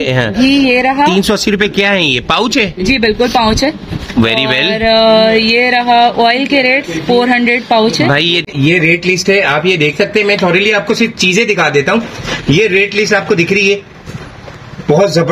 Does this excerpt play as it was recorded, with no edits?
no; 1 cut; at 8.5 s

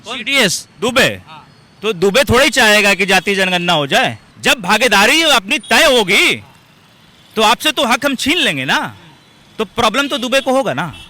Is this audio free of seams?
no; 1 cut; at 4.3 s

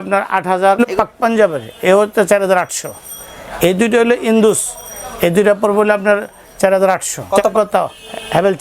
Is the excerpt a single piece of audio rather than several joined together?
no; 2 cuts; at 0.9 s, 7.5 s

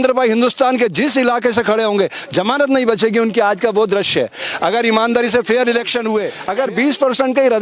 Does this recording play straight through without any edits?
no; 1 cut; at 6.4 s

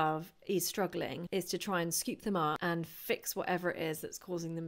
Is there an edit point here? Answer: yes; 2 cuts; at 1.2 s, 2.6 s

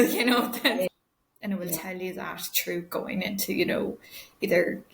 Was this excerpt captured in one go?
no; 1 cut; at 0.9 s

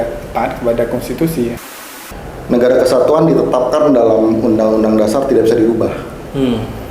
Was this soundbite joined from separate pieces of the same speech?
yes; 1 cut; at 1.7 s

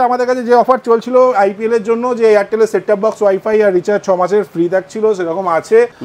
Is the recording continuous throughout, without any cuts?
yes; 0 cuts

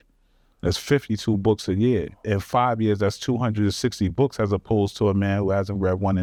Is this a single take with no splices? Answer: yes; 0 cuts

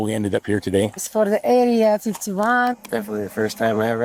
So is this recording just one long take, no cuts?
no; 2 cuts; at 1.1 s, 2.7 s

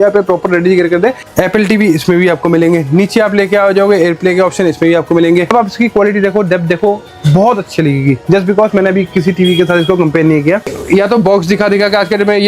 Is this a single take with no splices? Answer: no; 3 cuts; at 1.3 s, 5.5 s, 10.8 s

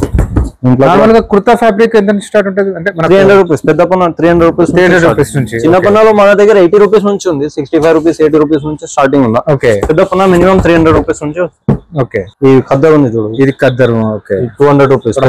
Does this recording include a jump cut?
yes; 1 cut; at 12.2 s

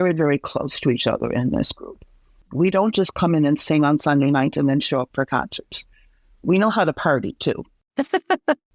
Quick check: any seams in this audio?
no; 0 cuts

